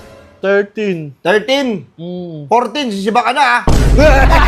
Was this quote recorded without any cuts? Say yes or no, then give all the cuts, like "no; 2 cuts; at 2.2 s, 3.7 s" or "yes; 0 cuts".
yes; 0 cuts